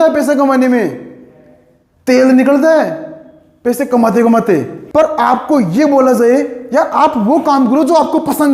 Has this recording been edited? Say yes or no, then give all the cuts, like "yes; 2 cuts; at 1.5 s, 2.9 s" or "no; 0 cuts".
yes; 1 cut; at 4.8 s